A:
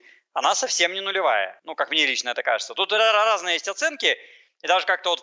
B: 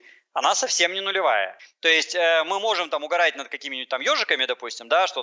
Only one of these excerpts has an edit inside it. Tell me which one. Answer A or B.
B